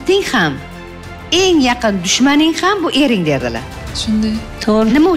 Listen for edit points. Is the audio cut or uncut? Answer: uncut